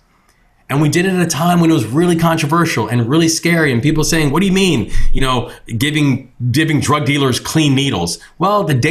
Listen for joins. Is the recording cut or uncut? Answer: uncut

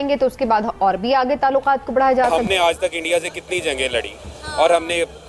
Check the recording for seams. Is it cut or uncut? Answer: cut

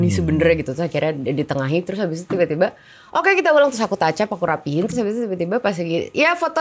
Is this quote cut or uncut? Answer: uncut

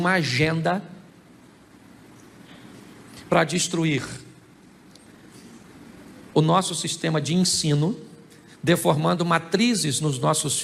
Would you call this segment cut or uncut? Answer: uncut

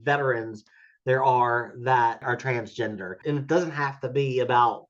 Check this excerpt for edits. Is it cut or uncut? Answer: cut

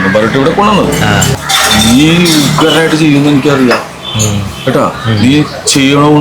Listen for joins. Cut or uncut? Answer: cut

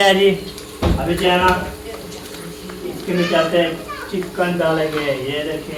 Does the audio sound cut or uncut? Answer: uncut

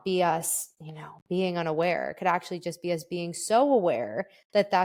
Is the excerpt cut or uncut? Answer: uncut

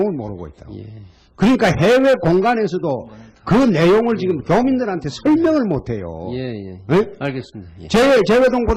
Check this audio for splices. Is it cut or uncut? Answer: uncut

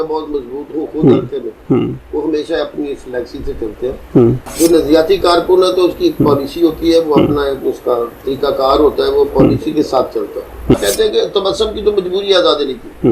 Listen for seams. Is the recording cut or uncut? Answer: cut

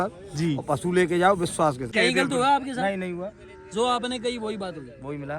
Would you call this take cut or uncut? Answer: cut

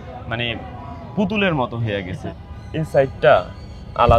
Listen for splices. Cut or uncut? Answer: cut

